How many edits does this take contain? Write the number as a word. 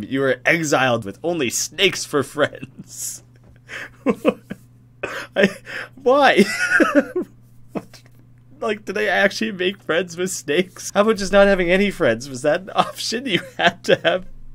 two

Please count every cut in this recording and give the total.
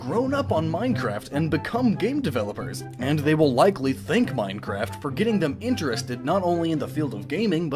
zero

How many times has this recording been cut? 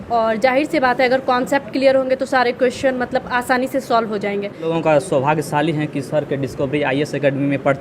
one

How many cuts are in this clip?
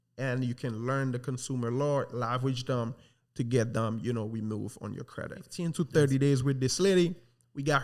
one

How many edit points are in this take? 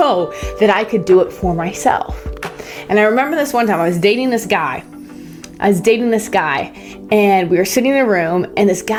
zero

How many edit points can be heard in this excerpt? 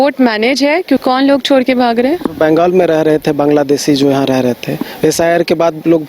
one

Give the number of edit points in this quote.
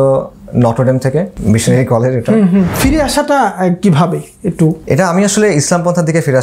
three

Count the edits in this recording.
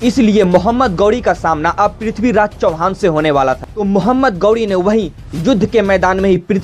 one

